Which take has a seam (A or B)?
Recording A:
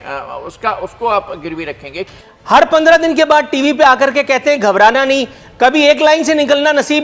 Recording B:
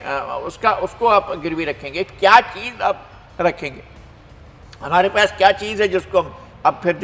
A